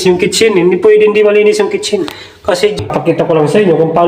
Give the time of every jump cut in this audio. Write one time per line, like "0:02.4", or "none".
0:02.8